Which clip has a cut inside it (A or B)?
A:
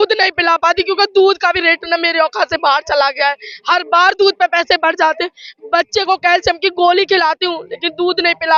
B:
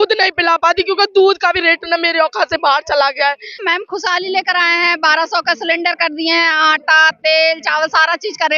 B